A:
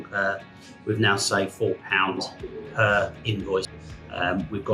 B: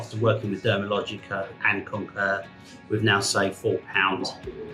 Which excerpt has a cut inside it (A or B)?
A